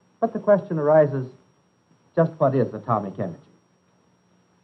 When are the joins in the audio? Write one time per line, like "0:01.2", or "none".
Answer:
none